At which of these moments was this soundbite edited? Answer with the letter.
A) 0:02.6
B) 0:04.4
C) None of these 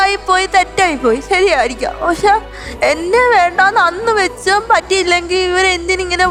C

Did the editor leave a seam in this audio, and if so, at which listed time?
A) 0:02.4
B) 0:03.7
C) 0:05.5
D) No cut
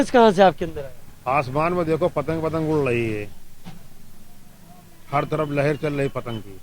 D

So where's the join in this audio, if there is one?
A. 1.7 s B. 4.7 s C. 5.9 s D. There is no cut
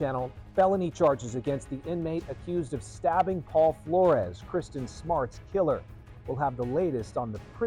D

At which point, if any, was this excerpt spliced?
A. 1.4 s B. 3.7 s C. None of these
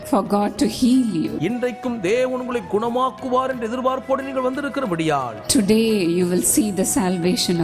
A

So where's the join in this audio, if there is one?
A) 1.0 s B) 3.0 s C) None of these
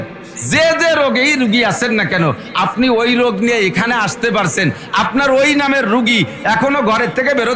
C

